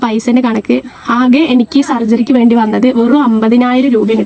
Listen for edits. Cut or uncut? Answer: uncut